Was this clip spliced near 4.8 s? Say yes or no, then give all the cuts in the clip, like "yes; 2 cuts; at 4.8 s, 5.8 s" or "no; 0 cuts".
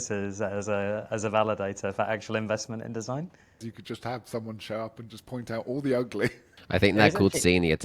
no; 2 cuts; at 3.6 s, 6.5 s